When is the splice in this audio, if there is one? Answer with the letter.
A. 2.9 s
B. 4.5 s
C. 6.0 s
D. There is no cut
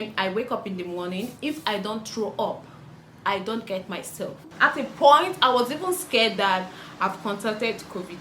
B